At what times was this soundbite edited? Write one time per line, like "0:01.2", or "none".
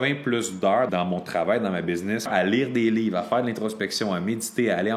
0:00.9
0:02.3